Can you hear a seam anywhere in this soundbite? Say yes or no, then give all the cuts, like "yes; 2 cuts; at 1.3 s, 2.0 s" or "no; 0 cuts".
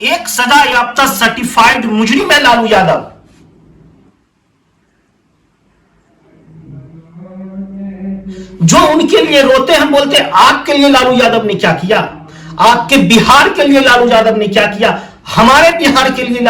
no; 0 cuts